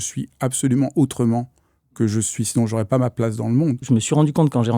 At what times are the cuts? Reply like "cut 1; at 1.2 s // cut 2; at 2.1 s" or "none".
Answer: cut 1; at 3.8 s